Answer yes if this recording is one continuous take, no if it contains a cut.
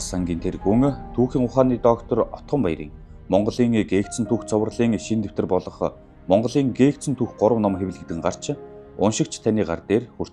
yes